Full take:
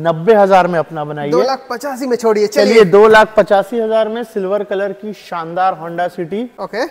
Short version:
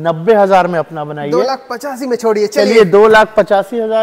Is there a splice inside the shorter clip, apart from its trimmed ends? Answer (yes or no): no